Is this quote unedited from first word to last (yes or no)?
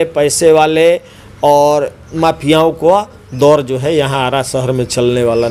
yes